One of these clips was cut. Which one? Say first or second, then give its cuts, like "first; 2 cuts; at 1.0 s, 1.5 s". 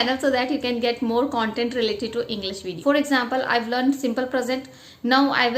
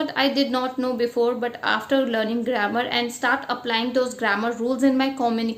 first; 1 cut; at 2.7 s